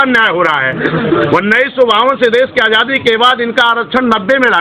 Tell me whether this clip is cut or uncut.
uncut